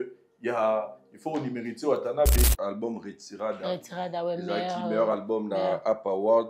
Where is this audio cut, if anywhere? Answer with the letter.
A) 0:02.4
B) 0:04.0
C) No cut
A